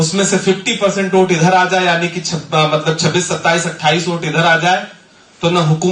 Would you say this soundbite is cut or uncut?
uncut